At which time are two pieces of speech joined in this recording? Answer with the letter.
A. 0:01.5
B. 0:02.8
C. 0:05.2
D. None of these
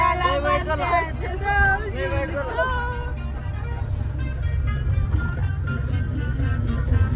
D